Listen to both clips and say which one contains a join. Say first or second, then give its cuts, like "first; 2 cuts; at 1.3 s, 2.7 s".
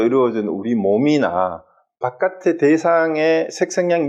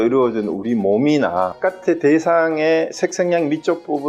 second; 1 cut; at 1.5 s